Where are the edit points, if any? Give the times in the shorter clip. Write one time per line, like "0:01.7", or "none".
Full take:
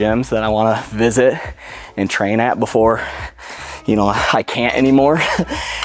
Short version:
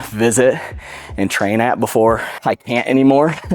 0:02.4